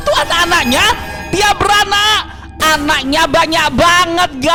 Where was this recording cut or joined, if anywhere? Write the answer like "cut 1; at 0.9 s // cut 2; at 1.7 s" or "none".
none